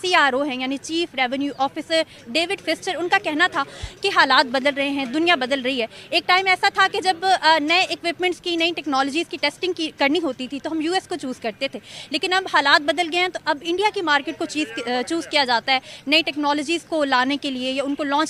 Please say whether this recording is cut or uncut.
uncut